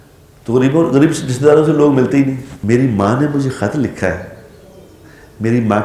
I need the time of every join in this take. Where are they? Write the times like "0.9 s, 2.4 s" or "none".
2.5 s